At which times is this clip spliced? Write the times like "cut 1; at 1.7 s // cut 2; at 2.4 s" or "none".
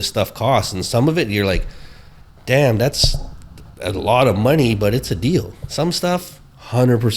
cut 1; at 5.6 s